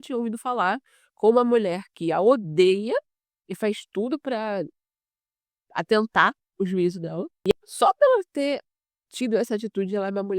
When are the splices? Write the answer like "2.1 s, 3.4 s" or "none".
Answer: 7.5 s

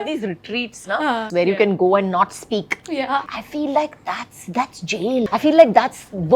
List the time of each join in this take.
1.2 s, 5.3 s

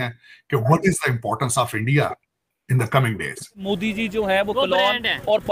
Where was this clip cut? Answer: 3.6 s

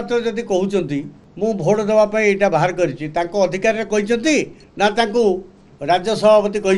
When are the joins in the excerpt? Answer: 1.2 s, 4.6 s

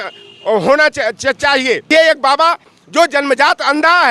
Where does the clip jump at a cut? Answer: 1.9 s

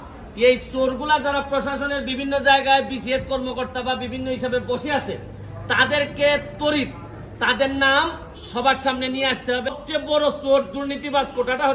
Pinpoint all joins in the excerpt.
9.8 s

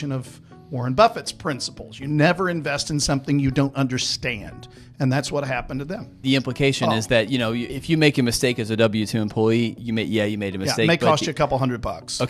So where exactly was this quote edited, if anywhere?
6.1 s, 7.7 s, 9.8 s

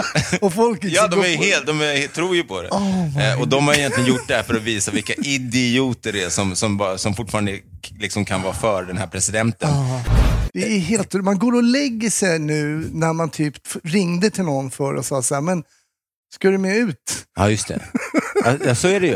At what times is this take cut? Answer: 10.1 s

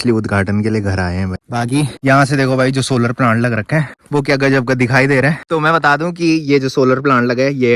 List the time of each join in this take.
none

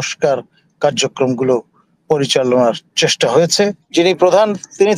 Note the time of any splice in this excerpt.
3.8 s

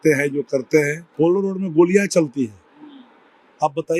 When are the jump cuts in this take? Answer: 1.0 s

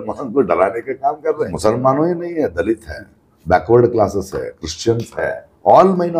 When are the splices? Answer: 1.5 s

